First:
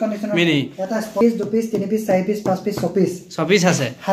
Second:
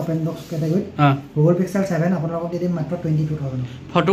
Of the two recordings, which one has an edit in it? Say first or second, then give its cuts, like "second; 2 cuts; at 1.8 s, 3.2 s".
first; 1 cut; at 1.2 s